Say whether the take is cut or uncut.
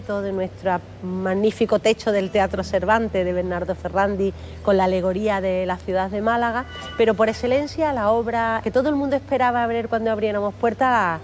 cut